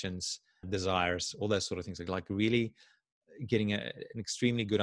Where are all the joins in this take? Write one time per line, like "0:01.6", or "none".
none